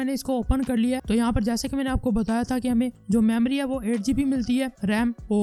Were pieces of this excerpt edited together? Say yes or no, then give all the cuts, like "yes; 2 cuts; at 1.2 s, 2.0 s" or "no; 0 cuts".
no; 0 cuts